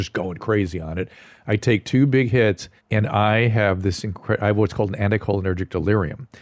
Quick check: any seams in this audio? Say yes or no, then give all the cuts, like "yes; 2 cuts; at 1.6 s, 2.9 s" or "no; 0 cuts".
yes; 1 cut; at 2.7 s